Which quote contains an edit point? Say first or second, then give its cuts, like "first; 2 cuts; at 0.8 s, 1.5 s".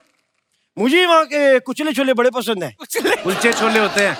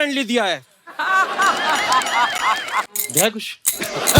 second; 1 cut; at 2.9 s